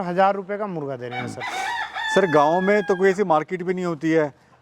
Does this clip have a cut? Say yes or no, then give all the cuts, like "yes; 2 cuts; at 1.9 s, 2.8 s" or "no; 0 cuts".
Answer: no; 0 cuts